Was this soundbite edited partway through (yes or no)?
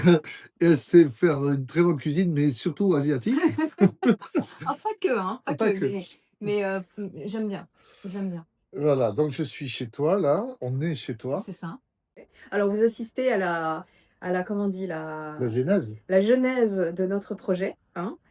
yes